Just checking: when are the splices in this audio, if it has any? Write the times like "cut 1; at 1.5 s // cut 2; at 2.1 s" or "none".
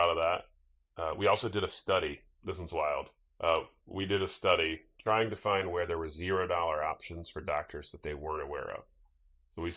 cut 1; at 2.3 s // cut 2; at 3.2 s // cut 3; at 4.9 s